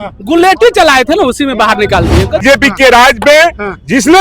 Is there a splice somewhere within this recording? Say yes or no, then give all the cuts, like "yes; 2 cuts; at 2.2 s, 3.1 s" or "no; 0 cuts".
yes; 1 cut; at 2.4 s